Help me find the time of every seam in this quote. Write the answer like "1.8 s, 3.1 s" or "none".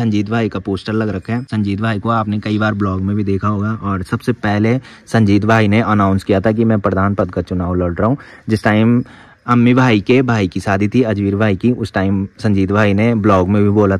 none